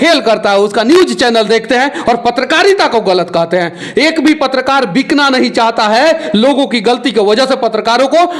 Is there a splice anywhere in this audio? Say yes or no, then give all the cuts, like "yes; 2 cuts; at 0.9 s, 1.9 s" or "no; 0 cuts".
no; 0 cuts